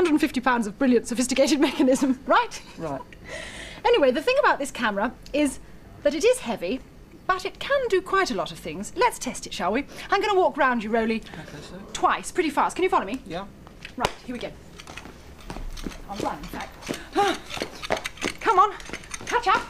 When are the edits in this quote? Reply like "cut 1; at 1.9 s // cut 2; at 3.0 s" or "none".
none